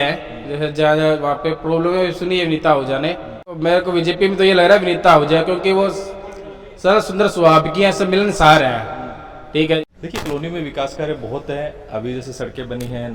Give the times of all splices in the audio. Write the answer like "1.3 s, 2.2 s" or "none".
3.4 s, 9.8 s